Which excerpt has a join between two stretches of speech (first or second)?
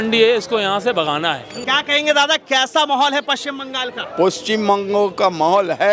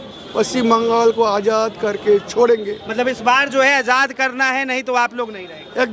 first